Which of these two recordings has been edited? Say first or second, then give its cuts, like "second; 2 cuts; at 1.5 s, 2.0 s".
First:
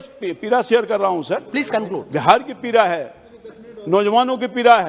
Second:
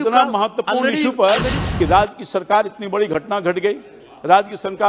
second; 1 cut; at 1.6 s